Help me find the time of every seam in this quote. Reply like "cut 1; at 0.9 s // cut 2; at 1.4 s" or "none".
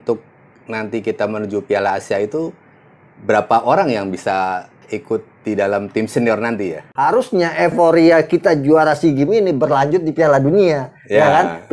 cut 1; at 4.8 s // cut 2; at 6.9 s